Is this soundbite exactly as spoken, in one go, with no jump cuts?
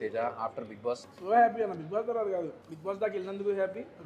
no; 2 cuts; at 1.1 s, 2.6 s

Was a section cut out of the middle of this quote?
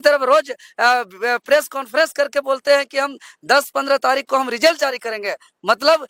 no; 0 cuts

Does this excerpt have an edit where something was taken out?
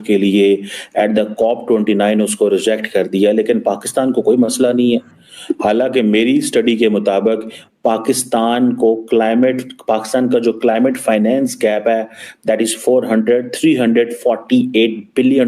no; 0 cuts

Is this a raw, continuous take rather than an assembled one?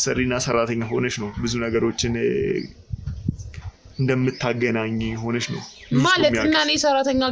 yes; 0 cuts

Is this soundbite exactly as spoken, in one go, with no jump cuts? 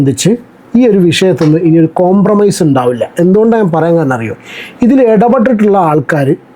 yes; 0 cuts

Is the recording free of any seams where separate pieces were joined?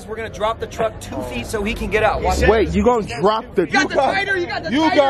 no; 1 cut; at 3.7 s

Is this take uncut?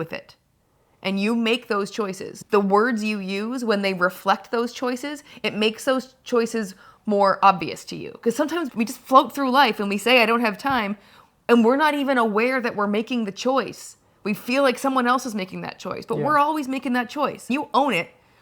no; 3 cuts; at 2.3 s, 8.7 s, 17.5 s

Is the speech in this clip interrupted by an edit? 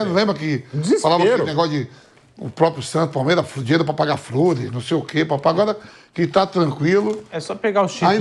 no; 0 cuts

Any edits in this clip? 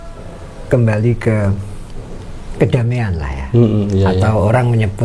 no; 0 cuts

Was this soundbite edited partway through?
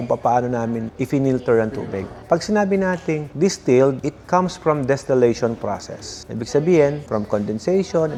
no; 0 cuts

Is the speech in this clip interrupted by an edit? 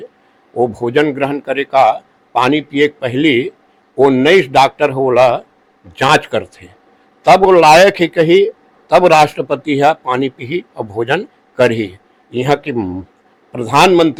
no; 0 cuts

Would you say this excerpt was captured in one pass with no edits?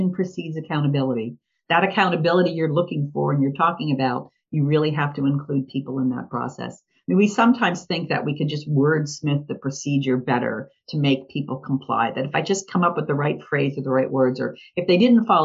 yes; 0 cuts

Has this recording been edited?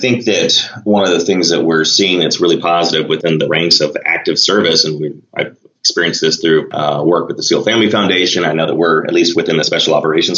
yes; 2 cuts; at 3.2 s, 6.7 s

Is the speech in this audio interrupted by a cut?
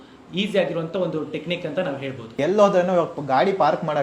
yes; 1 cut; at 2.2 s

